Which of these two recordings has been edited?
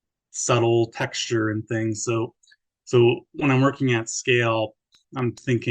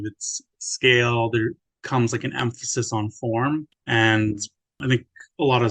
second; 3 cuts; at 1.7 s, 3.8 s, 4.8 s

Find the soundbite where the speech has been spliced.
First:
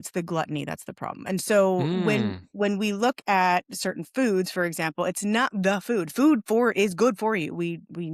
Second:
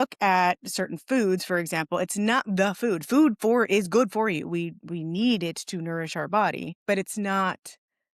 second; 1 cut; at 6.7 s

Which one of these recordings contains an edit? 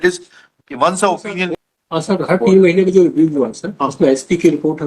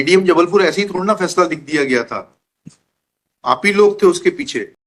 first; 1 cut; at 1.5 s

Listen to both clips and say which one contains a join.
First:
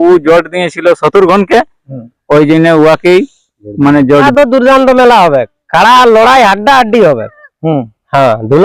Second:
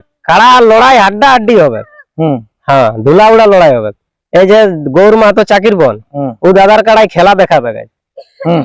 first; 1 cut; at 4.3 s

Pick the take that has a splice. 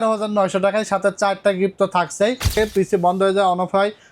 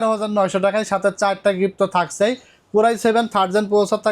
first; 1 cut; at 2.5 s

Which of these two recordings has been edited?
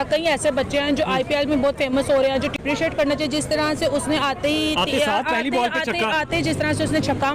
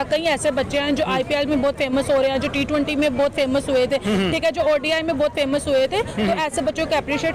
first; 1 cut; at 2.6 s

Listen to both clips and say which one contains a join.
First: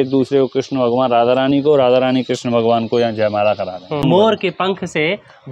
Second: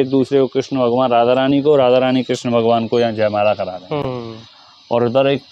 first; 1 cut; at 4.0 s

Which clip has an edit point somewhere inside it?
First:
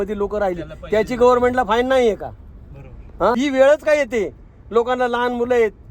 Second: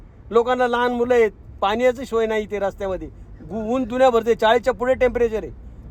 first; 1 cut; at 3.4 s

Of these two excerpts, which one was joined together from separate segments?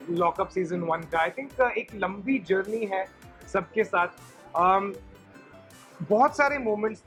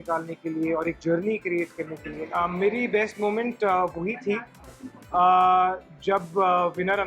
second; 1 cut; at 2.2 s

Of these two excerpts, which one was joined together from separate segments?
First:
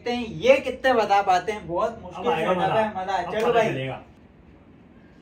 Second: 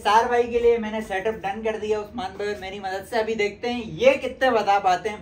first; 1 cut; at 4.1 s

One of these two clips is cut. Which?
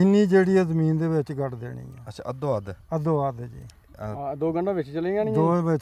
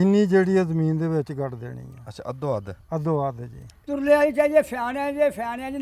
second; 1 cut; at 3.8 s

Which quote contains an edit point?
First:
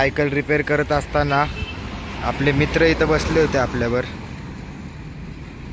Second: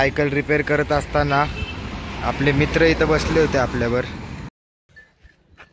second; 1 cut; at 4.6 s

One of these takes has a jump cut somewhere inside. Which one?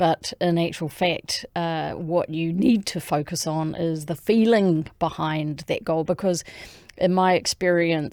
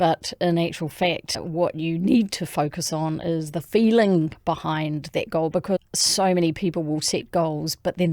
second; 2 cuts; at 1.4 s, 6.0 s

